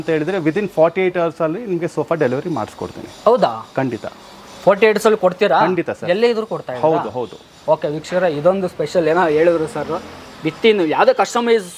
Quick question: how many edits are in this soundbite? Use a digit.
0